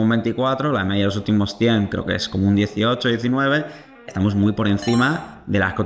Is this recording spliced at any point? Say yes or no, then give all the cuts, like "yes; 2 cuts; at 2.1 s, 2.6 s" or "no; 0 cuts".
no; 0 cuts